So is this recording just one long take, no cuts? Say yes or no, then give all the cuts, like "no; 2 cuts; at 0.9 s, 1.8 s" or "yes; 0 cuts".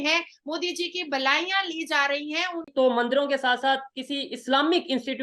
no; 1 cut; at 2.6 s